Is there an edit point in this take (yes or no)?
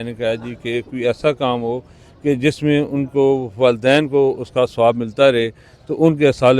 no